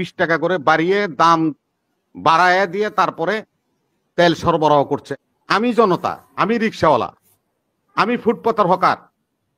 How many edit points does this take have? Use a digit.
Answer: 1